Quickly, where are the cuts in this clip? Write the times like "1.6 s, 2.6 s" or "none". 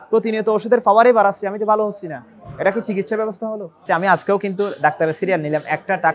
3.8 s